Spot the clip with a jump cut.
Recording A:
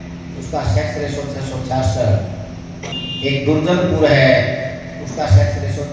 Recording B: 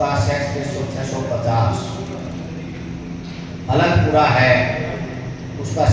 A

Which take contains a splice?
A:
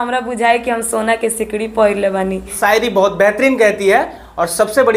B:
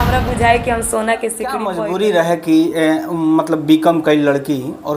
B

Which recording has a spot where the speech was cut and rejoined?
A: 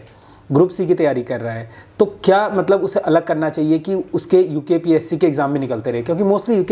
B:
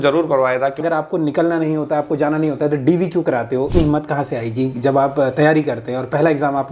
B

